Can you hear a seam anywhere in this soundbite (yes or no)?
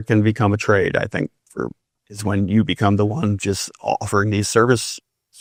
no